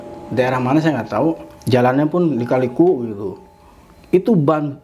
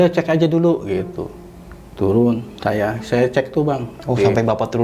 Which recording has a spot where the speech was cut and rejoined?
first; 1 cut; at 1.5 s

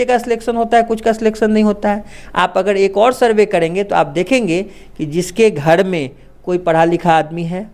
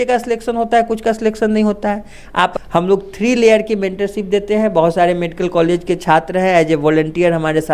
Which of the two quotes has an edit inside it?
second; 1 cut; at 2.6 s

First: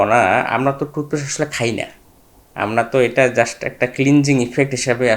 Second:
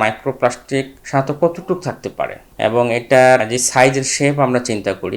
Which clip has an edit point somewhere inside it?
second; 3 cuts; at 1.0 s, 2.4 s, 3.4 s

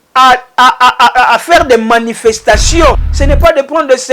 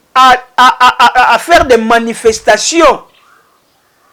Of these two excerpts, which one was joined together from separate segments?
first; 1 cut; at 3.1 s

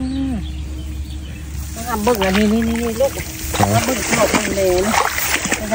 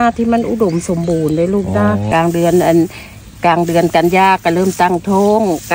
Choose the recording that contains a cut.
second; 1 cut; at 2.0 s

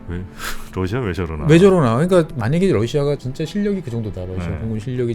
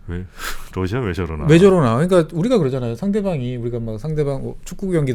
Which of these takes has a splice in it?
first; 2 cuts; at 2.3 s, 3.3 s

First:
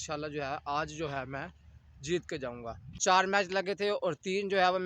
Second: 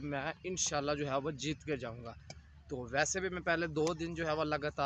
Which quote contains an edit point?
first; 1 cut; at 2.9 s

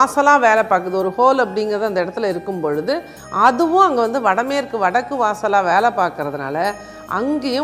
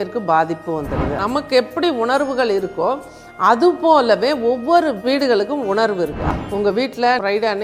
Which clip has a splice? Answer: second; 2 cuts; at 1.2 s, 6.2 s

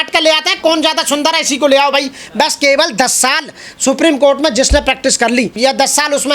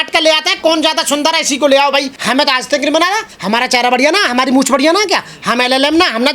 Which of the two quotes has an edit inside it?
second; 2 cuts; at 2.2 s, 3.3 s

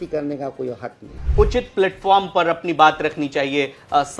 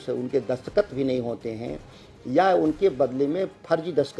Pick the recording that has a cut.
first; 1 cut; at 1.2 s

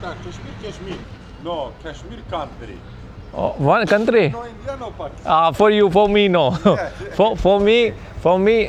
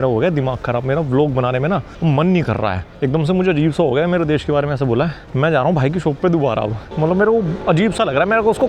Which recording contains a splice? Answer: second; 5 cuts; at 1.9 s, 2.9 s, 5.2 s, 6.9 s, 7.6 s

